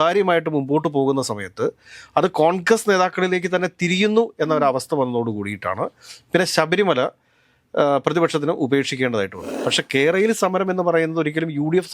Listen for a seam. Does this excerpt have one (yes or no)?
yes